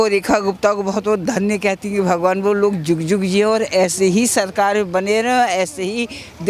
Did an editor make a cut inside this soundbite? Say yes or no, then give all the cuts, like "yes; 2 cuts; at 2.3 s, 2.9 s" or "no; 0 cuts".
no; 0 cuts